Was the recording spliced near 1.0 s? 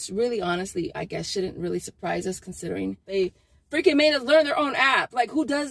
no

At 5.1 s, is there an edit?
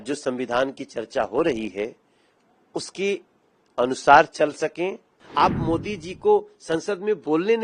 yes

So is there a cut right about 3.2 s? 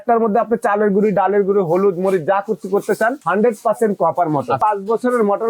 yes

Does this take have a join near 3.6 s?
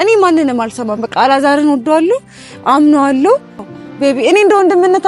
yes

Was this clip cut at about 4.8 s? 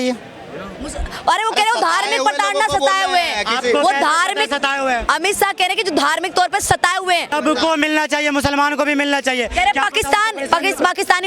no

